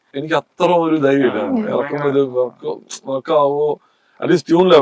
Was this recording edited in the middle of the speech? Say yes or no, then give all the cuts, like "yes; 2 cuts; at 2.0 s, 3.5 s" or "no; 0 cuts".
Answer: no; 0 cuts